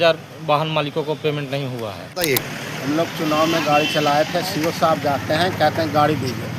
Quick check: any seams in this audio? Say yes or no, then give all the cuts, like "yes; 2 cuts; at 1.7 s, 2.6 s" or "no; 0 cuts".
yes; 1 cut; at 2.0 s